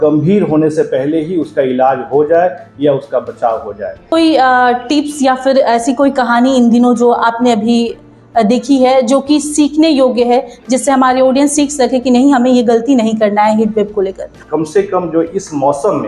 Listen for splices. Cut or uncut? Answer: cut